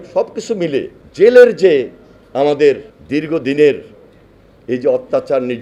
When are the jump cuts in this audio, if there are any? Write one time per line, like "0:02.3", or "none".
0:01.0
0:02.9